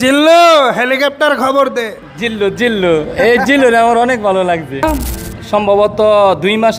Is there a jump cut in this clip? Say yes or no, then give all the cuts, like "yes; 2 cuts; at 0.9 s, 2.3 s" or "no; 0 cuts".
yes; 1 cut; at 4.8 s